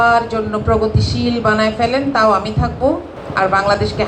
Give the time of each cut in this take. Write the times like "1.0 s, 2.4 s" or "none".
3.2 s